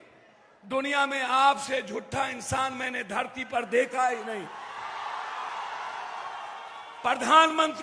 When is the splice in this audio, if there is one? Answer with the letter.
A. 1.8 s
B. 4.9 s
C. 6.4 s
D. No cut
D